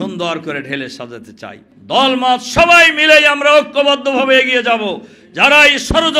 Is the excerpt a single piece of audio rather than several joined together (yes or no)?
no